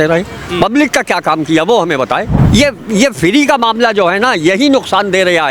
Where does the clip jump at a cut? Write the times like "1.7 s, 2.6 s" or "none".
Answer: 2.4 s

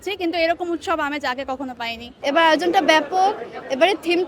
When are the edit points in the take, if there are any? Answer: 2.0 s

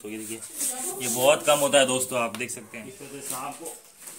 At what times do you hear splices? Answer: 2.6 s

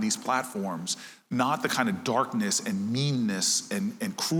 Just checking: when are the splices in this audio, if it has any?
none

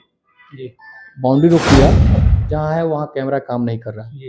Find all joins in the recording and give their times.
2.1 s

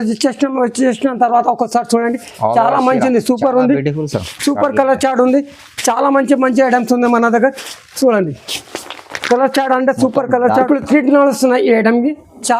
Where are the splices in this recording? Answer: 10.7 s

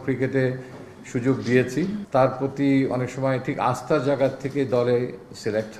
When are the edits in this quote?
2.0 s

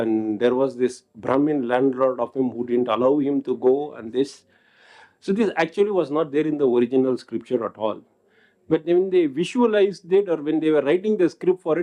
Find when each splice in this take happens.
none

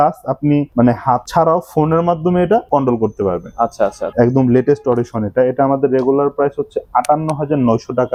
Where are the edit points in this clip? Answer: none

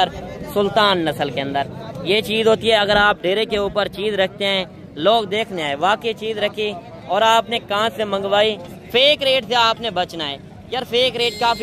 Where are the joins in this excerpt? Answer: 8.7 s

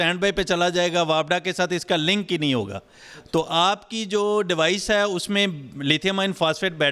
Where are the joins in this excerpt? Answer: none

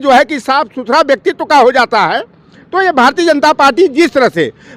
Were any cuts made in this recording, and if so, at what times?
none

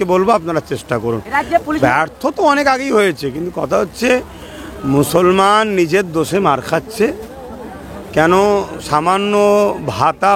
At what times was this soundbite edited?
1.8 s

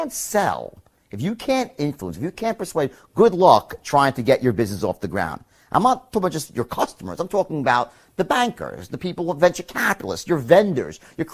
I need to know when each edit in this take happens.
none

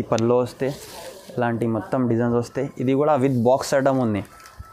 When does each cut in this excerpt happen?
none

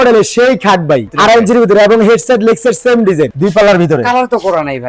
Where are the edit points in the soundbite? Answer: 1.1 s, 3.3 s

